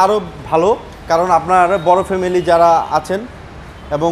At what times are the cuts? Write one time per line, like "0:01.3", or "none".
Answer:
none

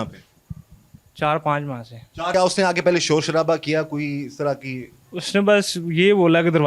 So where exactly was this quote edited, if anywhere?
0:02.3

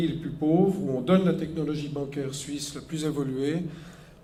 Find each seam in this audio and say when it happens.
none

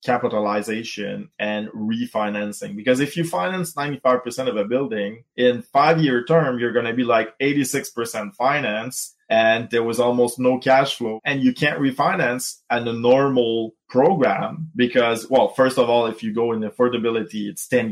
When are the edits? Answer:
0:05.2
0:11.2

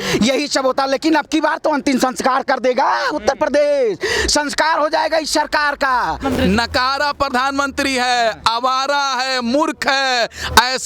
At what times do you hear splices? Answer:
0:06.2

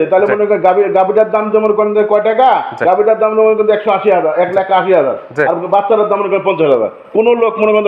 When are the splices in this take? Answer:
none

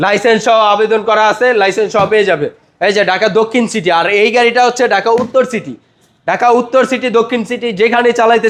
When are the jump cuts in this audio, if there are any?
none

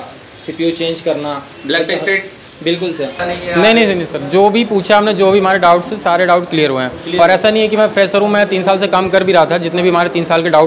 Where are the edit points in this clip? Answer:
0:03.2

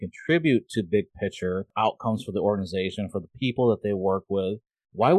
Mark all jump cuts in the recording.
0:01.7

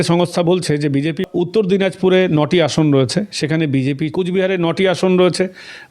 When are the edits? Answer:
0:01.3
0:04.1

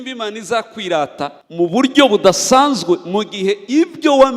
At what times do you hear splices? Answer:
0:01.4

